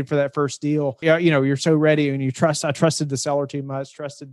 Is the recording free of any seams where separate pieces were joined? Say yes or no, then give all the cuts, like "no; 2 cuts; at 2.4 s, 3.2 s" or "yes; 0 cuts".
no; 1 cut; at 1.0 s